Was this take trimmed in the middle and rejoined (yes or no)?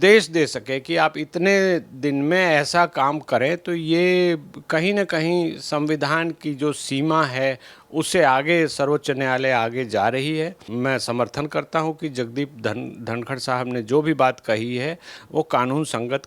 yes